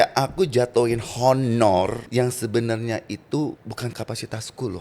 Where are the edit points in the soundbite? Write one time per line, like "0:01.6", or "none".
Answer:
0:02.0
0:03.9